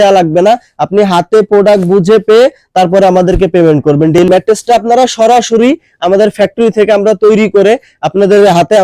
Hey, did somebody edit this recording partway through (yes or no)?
yes